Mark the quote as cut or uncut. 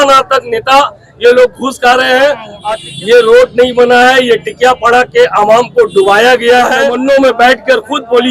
cut